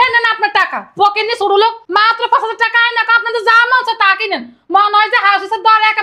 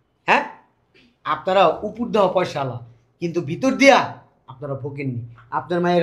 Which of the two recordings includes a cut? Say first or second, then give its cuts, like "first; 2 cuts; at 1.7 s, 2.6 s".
first; 1 cut; at 1.8 s